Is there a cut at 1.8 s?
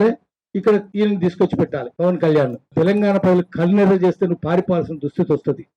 yes; 3 cuts; at 0.9 s, 1.8 s, 2.7 s

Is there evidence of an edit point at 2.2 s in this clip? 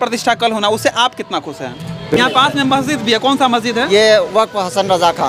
yes; 1 cut; at 2.2 s

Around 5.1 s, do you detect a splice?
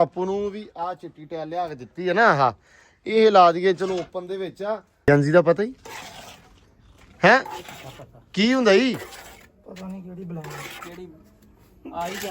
yes; 1 cut; at 5.1 s

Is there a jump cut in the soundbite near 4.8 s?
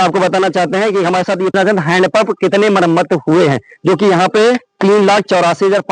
no; 1 cut; at 1.5 s

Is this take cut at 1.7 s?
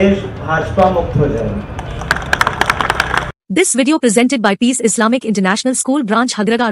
no; 1 cut; at 3.3 s

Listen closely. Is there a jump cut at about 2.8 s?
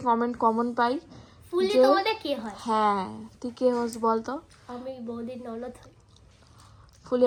no; 0 cuts

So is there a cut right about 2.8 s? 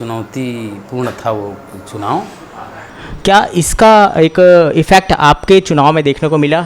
yes; 1 cut; at 2.8 s

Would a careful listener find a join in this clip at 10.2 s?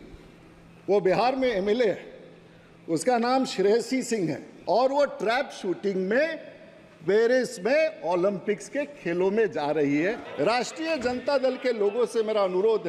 yes; 2 cuts; at 4.5 s, 10.2 s

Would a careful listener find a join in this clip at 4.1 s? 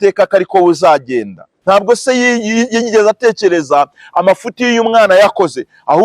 no; 1 cut; at 1.5 s

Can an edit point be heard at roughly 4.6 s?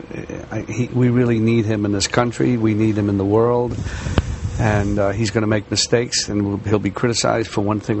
no; 1 cut; at 2.9 s

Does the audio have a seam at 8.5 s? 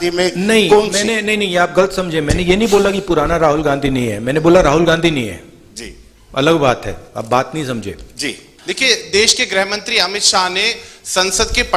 yes; 1 cut; at 8.5 s

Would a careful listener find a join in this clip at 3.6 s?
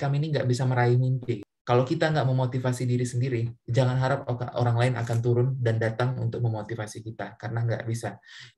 no; 1 cut; at 1.5 s

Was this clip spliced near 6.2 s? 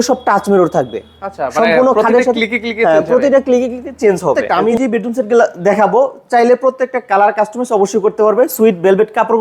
no; 1 cut; at 4.5 s

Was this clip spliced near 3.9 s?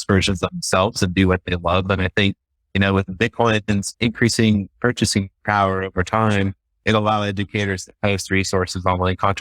yes; 1 cut; at 3.9 s

